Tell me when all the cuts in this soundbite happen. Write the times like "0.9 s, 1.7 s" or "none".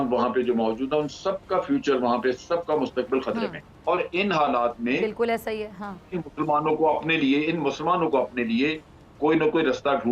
3.7 s